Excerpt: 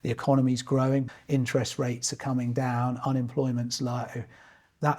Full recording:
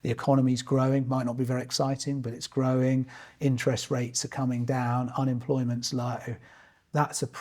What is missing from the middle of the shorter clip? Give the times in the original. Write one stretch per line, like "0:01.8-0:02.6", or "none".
0:01.1-0:03.2